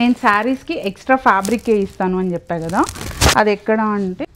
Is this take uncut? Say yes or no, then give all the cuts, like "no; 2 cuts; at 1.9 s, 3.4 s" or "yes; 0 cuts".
yes; 0 cuts